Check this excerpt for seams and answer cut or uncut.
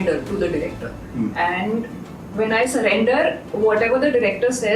uncut